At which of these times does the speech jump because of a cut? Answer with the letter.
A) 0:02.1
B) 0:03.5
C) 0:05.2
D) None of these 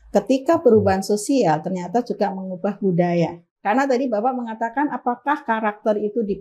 B